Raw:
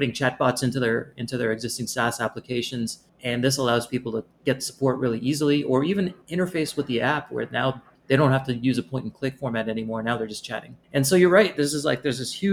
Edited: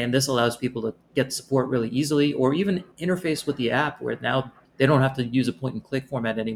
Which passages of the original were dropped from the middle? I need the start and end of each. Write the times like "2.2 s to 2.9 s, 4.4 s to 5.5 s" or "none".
none